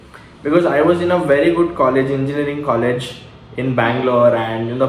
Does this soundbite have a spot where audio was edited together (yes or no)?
no